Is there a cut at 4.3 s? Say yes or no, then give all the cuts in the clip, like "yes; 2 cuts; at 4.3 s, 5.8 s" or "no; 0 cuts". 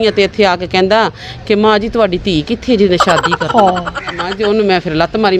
yes; 1 cut; at 4.3 s